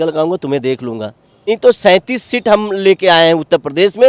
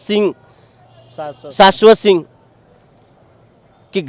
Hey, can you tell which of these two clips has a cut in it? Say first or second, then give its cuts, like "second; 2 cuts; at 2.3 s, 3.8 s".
first; 1 cut; at 1.5 s